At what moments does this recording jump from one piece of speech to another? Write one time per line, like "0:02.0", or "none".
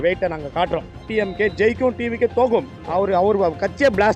0:01.1
0:02.8